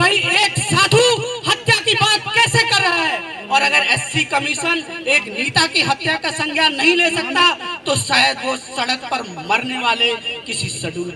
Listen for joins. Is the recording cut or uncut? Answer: uncut